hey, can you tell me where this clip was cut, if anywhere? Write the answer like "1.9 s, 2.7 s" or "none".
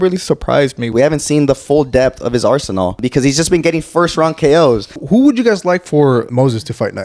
0.9 s, 3.0 s, 5.0 s, 6.3 s